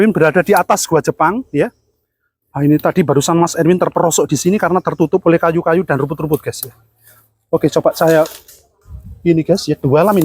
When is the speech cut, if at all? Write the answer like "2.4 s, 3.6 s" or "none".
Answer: none